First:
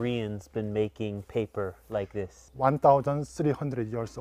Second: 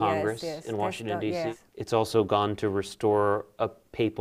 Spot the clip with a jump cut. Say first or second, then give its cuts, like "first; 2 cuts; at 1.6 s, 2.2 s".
second; 1 cut; at 1.5 s